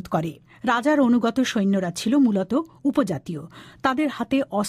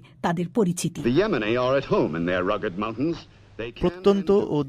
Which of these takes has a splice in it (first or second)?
first